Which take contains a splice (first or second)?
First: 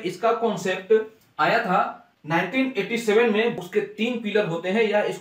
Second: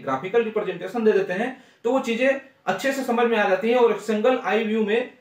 first